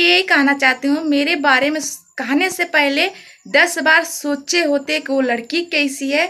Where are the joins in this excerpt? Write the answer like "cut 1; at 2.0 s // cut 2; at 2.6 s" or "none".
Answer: none